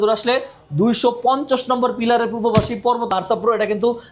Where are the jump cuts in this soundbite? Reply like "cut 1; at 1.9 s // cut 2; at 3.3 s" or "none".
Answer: cut 1; at 3.1 s